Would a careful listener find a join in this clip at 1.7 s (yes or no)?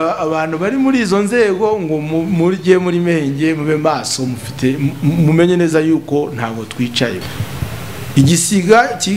no